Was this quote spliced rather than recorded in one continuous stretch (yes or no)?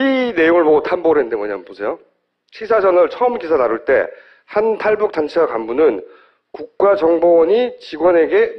no